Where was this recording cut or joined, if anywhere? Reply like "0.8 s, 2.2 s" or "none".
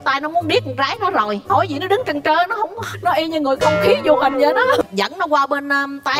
4.8 s

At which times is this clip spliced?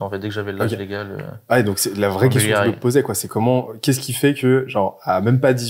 none

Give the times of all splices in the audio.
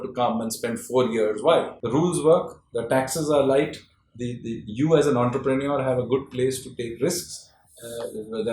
1.8 s

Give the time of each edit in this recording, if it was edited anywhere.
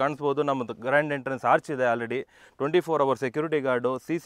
none

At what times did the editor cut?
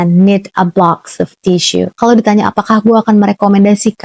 1.9 s

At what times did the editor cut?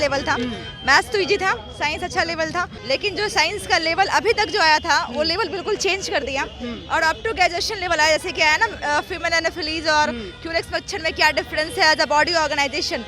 2.8 s

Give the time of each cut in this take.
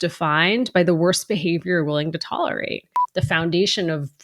2.9 s

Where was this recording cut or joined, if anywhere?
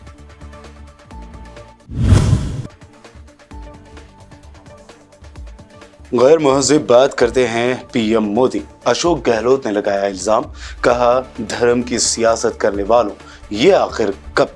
1.1 s

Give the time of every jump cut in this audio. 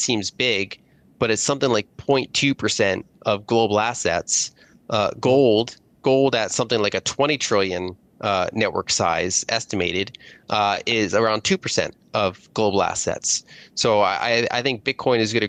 none

